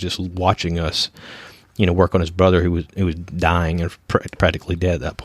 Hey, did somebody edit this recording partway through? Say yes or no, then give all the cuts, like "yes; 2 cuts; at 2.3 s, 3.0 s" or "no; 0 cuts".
no; 0 cuts